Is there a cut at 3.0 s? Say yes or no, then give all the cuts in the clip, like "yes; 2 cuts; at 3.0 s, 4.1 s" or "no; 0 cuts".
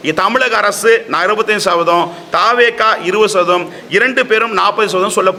no; 0 cuts